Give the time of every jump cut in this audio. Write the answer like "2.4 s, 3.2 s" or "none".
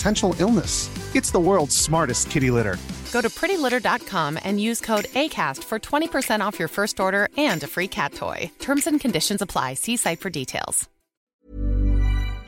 11.2 s